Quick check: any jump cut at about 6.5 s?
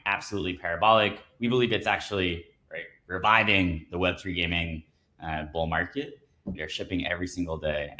yes; 1 cut; at 6.5 s

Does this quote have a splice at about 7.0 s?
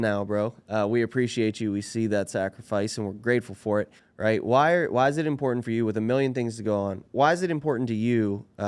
yes; 2 cuts; at 4.0 s, 7.0 s

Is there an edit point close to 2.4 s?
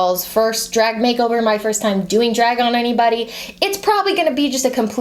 no; 0 cuts

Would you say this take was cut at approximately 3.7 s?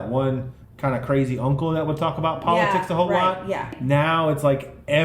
yes; 1 cut; at 3.7 s

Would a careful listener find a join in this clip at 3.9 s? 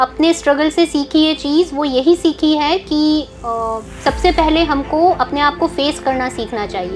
no; 0 cuts

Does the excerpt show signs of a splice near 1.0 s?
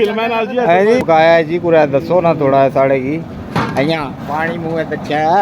yes; 1 cut; at 1.0 s

